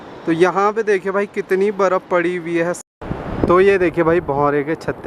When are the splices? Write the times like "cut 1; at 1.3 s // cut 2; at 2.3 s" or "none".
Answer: cut 1; at 2.9 s